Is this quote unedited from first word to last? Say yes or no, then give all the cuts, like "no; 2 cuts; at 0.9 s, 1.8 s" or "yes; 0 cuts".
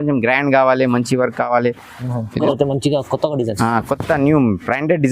no; 1 cut; at 2.4 s